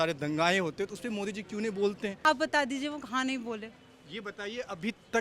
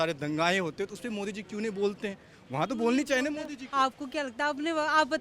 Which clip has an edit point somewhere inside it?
first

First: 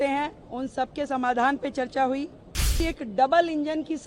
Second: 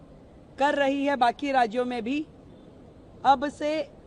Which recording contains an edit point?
first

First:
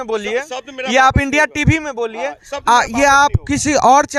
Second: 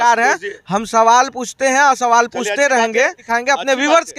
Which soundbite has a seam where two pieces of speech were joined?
second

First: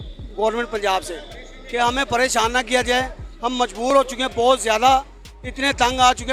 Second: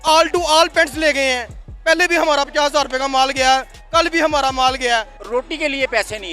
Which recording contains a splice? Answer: second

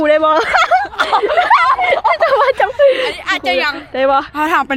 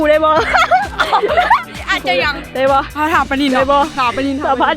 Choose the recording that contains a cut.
second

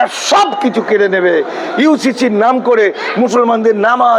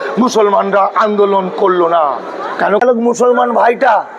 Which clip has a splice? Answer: second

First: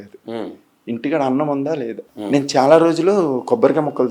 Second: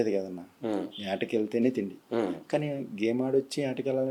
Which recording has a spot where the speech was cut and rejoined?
first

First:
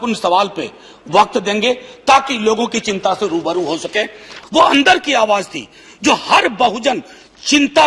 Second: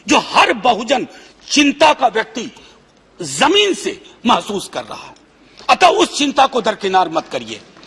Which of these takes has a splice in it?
first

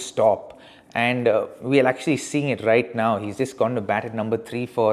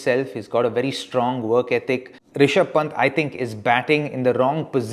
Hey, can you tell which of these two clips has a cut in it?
second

